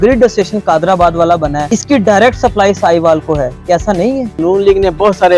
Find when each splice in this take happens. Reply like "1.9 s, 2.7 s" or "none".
1.7 s, 4.4 s